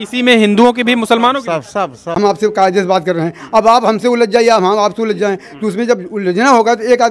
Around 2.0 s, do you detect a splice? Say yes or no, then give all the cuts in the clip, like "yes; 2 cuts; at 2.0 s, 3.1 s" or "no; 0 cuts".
yes; 1 cut; at 2.0 s